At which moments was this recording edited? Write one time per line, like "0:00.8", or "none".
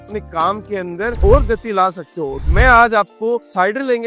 0:02.5

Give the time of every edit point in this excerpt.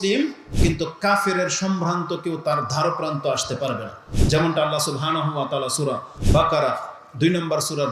0:06.1

